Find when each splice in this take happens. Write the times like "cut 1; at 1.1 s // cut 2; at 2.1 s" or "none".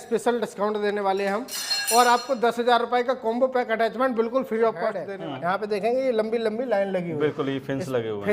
cut 1; at 5.1 s